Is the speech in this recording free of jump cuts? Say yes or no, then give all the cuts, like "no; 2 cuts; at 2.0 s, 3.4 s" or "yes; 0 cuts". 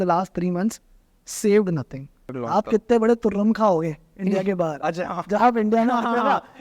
no; 1 cut; at 2.3 s